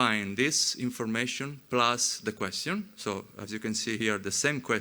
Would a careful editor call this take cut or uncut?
uncut